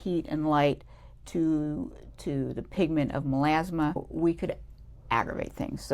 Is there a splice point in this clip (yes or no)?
yes